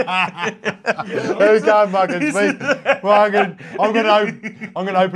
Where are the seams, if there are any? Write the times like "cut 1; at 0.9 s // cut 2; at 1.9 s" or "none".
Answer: none